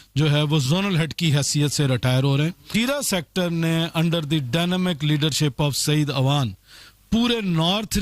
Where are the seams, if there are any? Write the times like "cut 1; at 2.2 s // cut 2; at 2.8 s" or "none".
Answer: cut 1; at 2.7 s